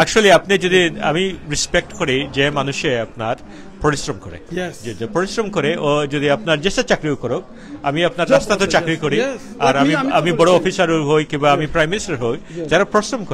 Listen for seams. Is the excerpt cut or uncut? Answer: uncut